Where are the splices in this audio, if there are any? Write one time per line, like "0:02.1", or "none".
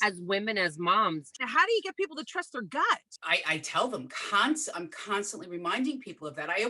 0:01.4
0:03.1